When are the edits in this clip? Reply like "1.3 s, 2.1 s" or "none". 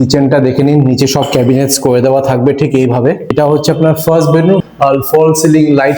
3.3 s, 4.6 s

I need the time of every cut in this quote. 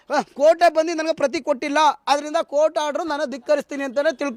none

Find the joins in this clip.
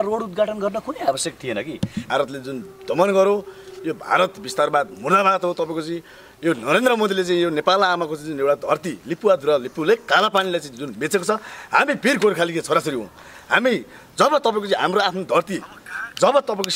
2.0 s

